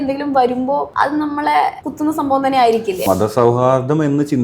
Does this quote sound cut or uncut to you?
cut